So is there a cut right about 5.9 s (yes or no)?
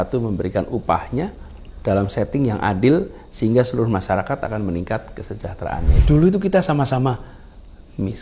yes